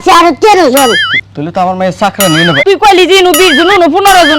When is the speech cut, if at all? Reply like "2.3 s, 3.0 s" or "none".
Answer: 2.6 s